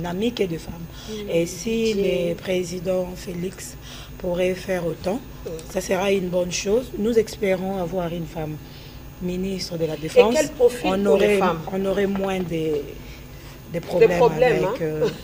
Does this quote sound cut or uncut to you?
uncut